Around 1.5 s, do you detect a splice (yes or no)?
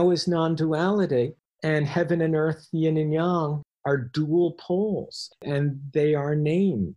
yes